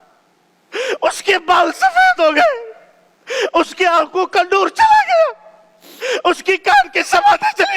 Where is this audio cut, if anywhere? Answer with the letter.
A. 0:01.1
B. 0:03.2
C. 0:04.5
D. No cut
D